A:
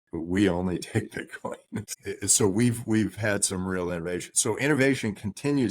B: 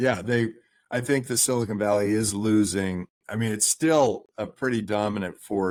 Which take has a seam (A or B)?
A